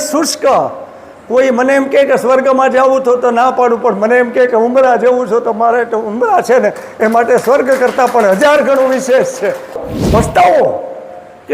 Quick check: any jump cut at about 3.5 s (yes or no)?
no